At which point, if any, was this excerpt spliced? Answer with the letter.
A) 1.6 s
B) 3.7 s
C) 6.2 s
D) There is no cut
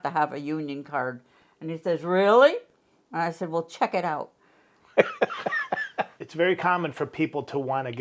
C